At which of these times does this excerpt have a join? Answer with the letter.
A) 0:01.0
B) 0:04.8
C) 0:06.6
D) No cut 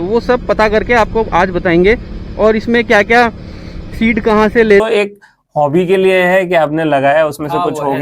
B